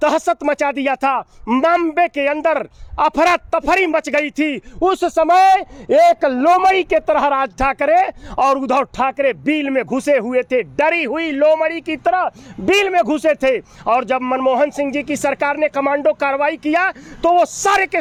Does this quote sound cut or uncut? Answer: uncut